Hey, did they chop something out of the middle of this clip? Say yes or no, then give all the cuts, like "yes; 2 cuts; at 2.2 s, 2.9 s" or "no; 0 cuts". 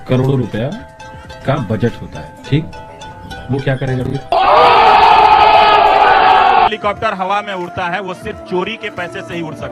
yes; 1 cut; at 6.7 s